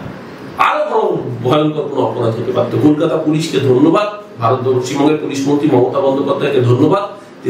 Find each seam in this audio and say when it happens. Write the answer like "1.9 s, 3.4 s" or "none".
none